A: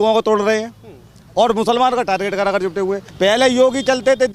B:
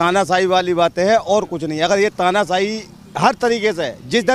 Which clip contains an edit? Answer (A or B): A